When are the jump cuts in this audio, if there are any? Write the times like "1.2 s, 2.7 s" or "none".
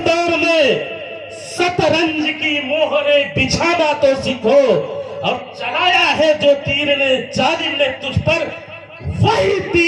none